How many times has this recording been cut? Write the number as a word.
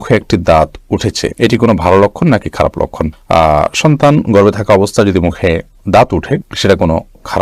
zero